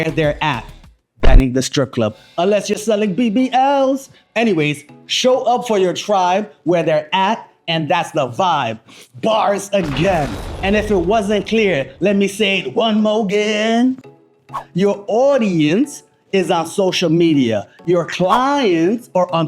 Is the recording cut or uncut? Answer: uncut